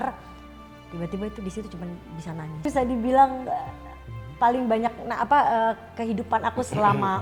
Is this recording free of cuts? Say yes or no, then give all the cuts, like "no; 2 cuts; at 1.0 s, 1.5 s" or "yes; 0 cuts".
no; 1 cut; at 2.7 s